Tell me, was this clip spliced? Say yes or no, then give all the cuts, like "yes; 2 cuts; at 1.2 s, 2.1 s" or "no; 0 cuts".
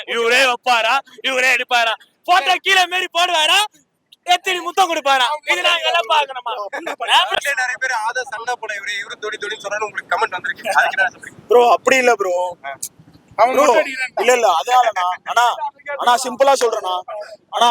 yes; 1 cut; at 7.3 s